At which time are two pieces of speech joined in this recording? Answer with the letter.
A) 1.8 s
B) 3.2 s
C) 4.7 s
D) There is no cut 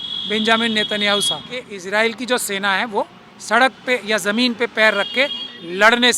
A